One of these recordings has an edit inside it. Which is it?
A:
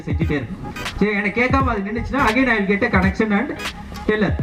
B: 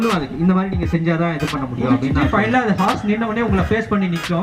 B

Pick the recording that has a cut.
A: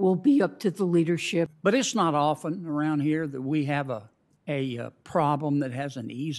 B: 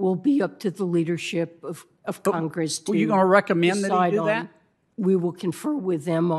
A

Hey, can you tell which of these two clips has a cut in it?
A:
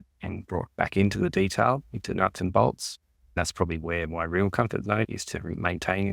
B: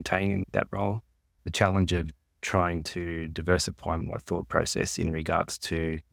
A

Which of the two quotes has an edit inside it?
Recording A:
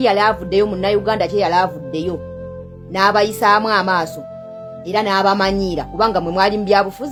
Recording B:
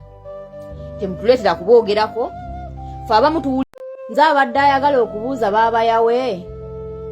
B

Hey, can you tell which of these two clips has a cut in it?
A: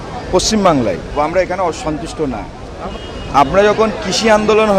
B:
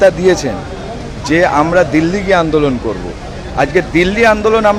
A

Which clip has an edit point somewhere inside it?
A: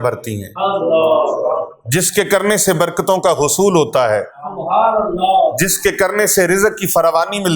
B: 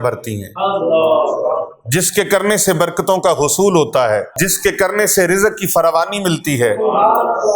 B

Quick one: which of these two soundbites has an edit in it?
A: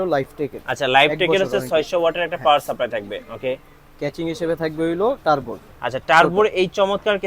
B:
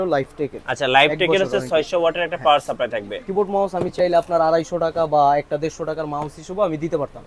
B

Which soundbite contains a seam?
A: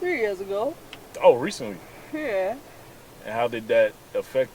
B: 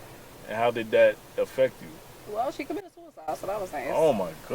B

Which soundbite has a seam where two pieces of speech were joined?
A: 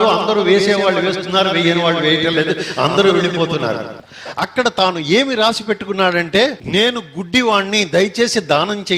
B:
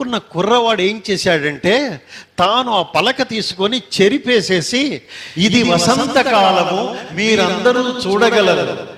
A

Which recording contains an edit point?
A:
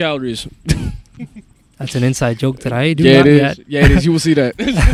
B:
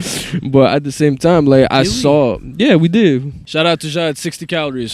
B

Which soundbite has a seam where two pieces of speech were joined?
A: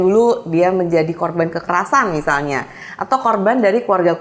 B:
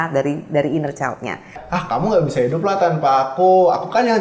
B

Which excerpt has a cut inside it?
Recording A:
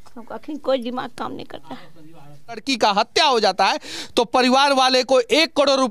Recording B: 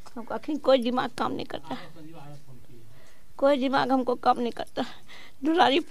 A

